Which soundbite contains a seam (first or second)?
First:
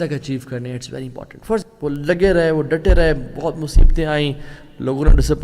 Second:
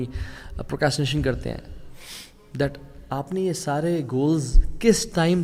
first